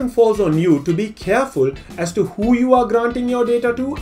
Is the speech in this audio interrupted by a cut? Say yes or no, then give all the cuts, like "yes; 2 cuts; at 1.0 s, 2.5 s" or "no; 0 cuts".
no; 0 cuts